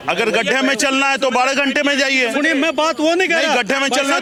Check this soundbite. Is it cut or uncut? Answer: uncut